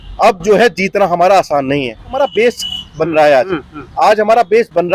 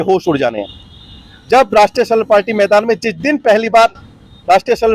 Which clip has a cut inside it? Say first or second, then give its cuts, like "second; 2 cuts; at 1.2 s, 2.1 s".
first; 1 cut; at 2.1 s